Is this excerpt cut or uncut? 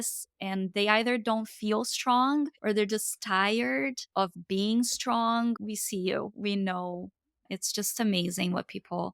cut